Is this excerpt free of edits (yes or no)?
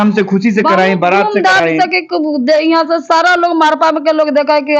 yes